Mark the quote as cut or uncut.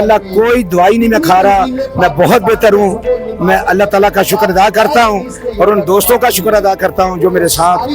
uncut